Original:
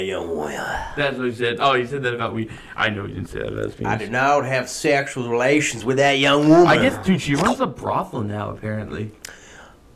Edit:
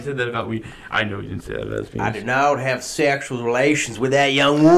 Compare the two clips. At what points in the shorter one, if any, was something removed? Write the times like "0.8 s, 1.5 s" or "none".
none